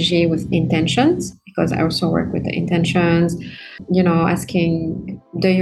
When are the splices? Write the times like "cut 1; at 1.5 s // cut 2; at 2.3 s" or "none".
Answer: cut 1; at 3.7 s